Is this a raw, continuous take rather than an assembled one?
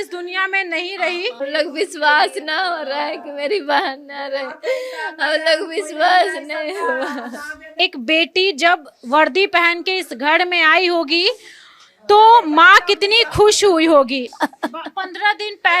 no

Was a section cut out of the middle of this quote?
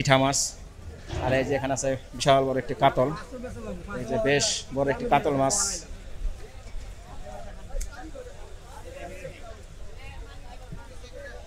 no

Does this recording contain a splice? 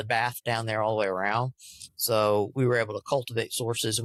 no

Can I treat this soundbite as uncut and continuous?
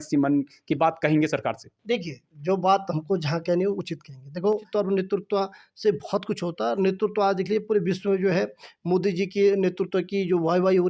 no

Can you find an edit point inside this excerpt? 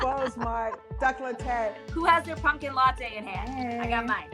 yes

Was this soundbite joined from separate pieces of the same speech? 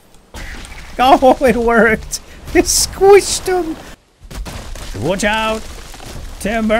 yes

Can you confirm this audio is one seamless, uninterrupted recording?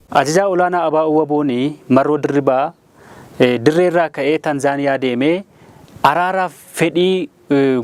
yes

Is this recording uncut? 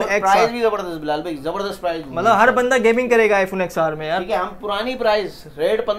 yes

